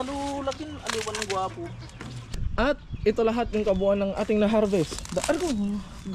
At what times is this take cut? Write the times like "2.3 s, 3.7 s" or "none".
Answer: 2.4 s